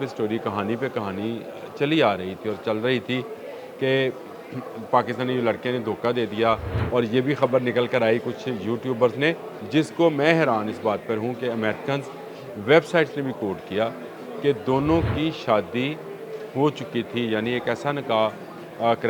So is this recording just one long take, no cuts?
no; 2 cuts; at 6.7 s, 9.5 s

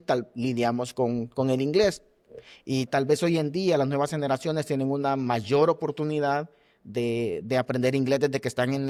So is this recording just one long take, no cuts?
yes; 0 cuts

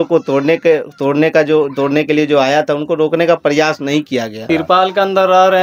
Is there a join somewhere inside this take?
yes; 1 cut; at 4.4 s

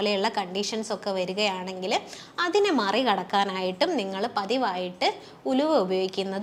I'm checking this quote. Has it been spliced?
no; 0 cuts

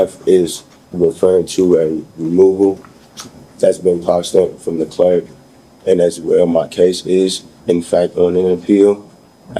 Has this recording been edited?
no; 0 cuts

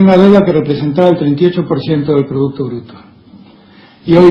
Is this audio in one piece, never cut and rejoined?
yes; 0 cuts

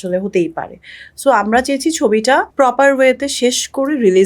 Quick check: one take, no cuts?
no; 1 cut; at 2.5 s

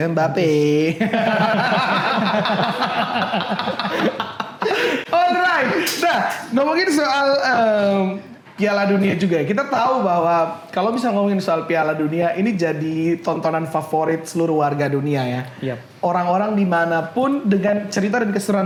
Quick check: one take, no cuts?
yes; 0 cuts

